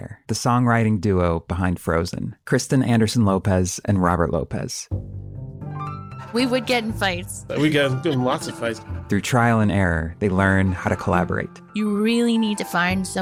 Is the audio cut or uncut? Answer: uncut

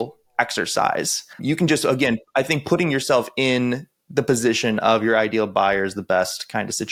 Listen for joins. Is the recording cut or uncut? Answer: uncut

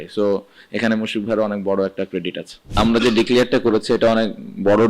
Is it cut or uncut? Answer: cut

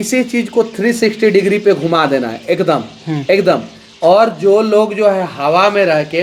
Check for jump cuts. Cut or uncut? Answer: uncut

